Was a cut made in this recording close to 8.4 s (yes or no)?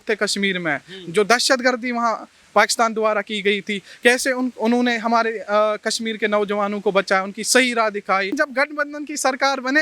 yes